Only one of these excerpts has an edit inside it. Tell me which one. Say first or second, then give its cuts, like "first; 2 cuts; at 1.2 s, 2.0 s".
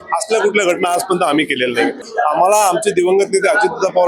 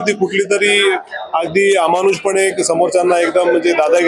first; 1 cut; at 2.1 s